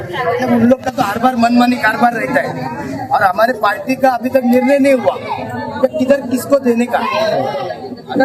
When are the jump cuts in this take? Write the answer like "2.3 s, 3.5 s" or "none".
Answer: none

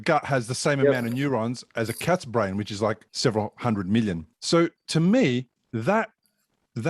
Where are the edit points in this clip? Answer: 3.1 s, 4.3 s

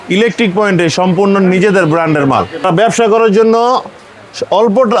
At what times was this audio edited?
2.6 s

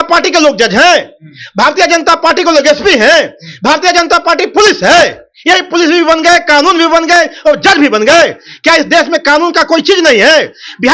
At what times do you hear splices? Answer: none

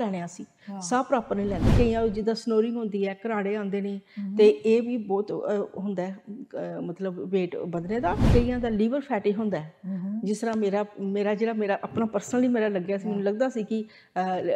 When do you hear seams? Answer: 1.7 s, 8.3 s

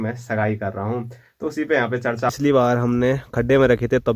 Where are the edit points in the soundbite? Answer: 2.3 s

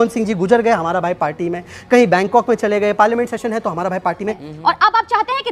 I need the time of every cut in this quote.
4.4 s

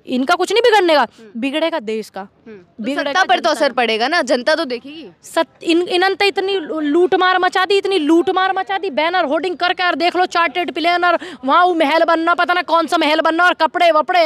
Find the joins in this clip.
none

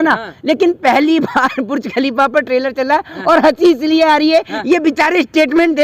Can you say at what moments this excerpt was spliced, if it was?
none

